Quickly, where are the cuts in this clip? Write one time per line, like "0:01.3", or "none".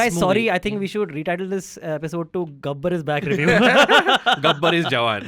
none